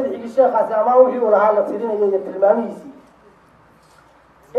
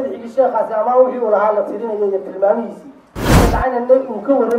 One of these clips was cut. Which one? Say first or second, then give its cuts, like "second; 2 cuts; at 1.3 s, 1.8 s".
second; 1 cut; at 3.4 s